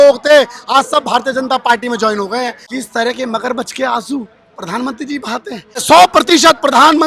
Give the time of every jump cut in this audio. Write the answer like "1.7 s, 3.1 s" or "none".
2.6 s, 5.8 s